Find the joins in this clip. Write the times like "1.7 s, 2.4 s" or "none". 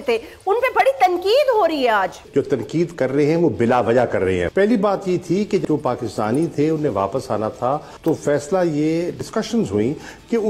2.2 s, 4.5 s, 5.6 s, 7.9 s, 9.2 s